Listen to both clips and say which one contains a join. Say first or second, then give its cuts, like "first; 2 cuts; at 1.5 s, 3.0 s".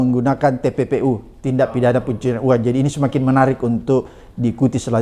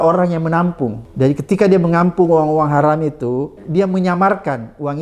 second; 2 cuts; at 1.0 s, 3.6 s